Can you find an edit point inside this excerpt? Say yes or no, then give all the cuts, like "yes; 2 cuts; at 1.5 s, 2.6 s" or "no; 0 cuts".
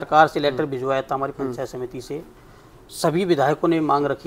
no; 0 cuts